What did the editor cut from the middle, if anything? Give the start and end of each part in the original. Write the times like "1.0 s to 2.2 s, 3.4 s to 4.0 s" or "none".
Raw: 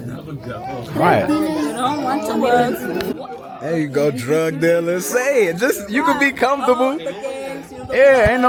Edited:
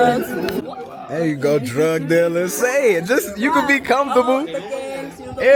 none